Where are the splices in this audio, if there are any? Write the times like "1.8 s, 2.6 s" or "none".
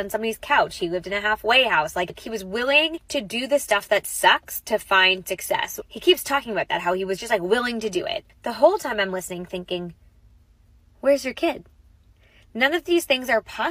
2.3 s, 3.0 s, 5.8 s, 8.2 s